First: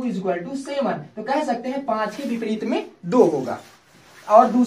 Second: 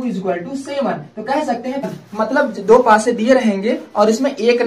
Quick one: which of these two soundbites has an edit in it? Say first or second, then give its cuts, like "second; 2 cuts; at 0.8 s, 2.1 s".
second; 1 cut; at 1.9 s